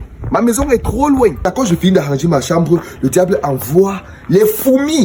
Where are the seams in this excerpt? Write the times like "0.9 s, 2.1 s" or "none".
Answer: 1.5 s